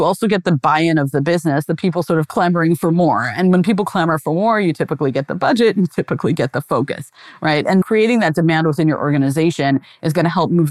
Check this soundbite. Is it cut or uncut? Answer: cut